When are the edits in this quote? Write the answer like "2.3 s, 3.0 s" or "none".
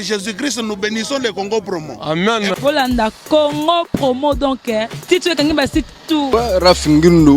6.3 s

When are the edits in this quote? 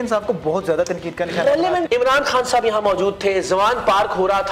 1.9 s

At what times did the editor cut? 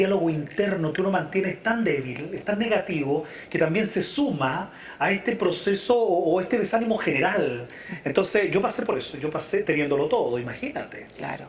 none

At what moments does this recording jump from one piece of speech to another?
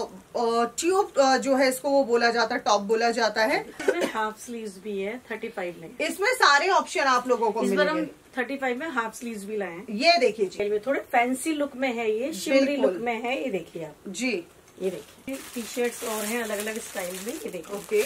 3.8 s, 10.6 s, 15.3 s

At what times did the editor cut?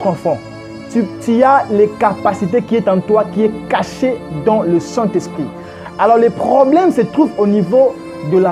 none

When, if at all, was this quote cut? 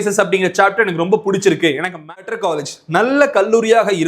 2.2 s

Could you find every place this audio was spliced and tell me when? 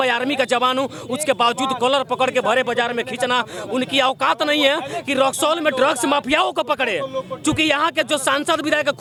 none

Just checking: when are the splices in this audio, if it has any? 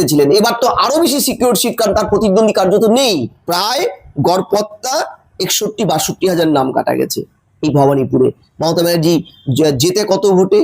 3.4 s

